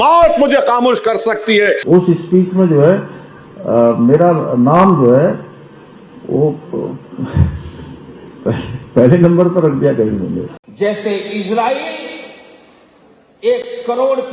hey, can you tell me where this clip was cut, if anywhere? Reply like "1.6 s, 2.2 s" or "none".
1.8 s, 10.6 s